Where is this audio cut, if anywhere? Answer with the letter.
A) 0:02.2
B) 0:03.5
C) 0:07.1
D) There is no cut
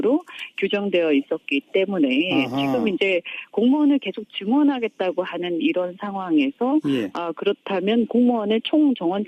C